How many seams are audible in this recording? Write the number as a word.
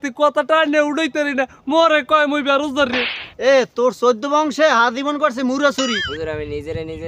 one